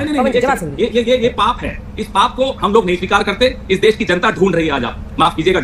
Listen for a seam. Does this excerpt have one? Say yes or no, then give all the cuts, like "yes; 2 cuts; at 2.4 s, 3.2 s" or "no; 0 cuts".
no; 0 cuts